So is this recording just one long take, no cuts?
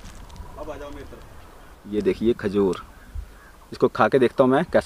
no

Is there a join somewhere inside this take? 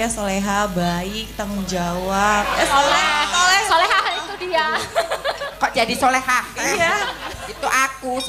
yes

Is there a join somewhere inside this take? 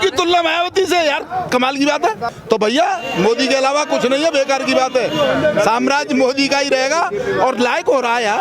no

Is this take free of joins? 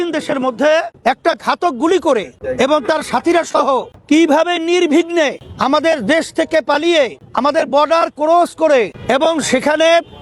no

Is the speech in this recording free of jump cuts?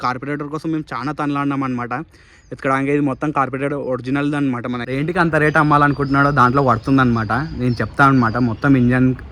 no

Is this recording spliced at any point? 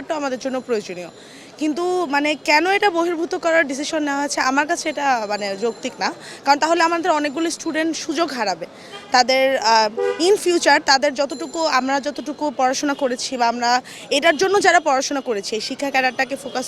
no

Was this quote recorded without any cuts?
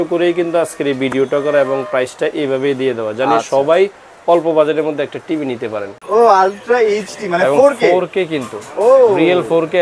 no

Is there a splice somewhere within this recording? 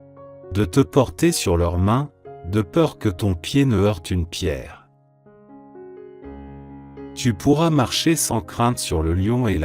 yes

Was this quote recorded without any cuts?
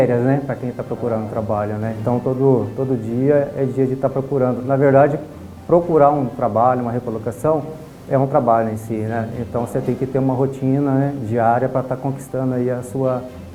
yes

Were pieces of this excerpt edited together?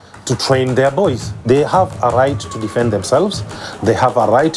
yes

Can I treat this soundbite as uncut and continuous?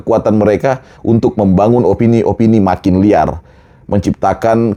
yes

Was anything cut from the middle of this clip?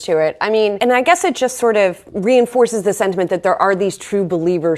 yes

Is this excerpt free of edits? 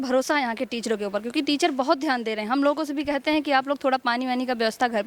yes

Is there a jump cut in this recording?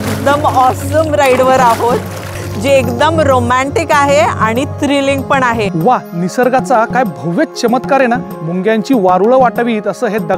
yes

